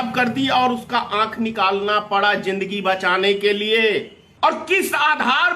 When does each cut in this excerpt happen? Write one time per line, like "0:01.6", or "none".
0:04.2